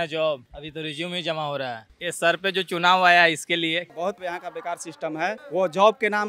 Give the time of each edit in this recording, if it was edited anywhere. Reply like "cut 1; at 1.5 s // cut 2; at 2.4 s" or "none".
cut 1; at 1.9 s // cut 2; at 3.9 s // cut 3; at 5.4 s